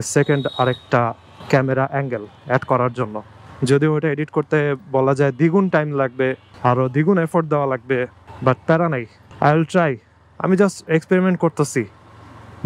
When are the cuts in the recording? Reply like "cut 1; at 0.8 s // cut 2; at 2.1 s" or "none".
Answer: none